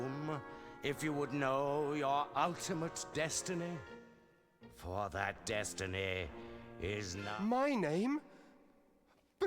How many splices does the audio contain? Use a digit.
1